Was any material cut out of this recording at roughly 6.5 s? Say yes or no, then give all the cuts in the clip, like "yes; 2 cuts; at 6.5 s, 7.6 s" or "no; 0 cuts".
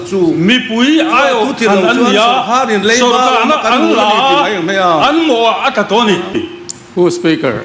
yes; 1 cut; at 6.5 s